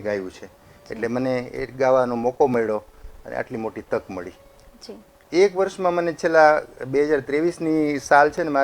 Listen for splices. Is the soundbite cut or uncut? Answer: cut